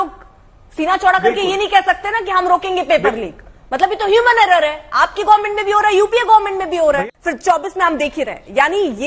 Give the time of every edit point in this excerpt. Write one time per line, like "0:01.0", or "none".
0:07.0